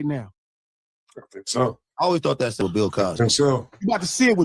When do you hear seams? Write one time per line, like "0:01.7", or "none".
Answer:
0:02.6